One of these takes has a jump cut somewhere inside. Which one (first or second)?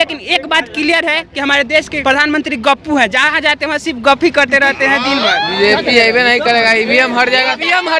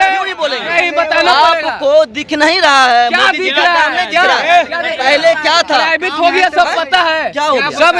first